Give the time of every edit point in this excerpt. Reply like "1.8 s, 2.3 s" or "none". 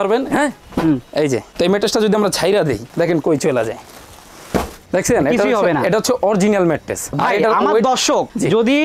1.5 s, 2.9 s, 4.8 s, 7.1 s